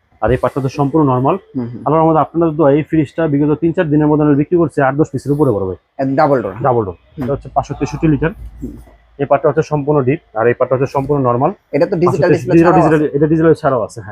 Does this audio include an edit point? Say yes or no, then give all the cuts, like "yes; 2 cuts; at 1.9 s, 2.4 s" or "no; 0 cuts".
yes; 1 cut; at 7.4 s